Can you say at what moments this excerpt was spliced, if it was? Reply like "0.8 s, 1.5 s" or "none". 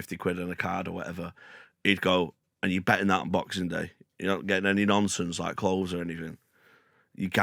none